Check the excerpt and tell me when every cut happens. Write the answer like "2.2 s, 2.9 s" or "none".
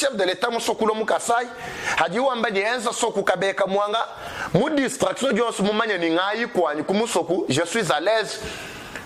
none